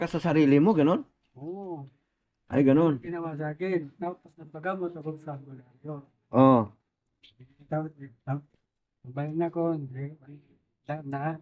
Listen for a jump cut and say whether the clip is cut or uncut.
uncut